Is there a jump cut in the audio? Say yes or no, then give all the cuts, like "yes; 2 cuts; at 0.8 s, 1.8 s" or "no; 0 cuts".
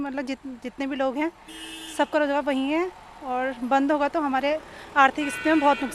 no; 0 cuts